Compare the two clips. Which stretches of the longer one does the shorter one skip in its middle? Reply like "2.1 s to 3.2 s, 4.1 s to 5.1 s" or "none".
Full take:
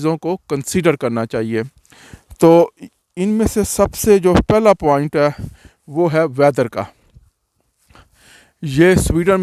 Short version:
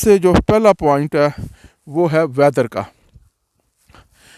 none